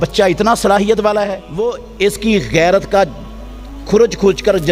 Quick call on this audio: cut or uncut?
cut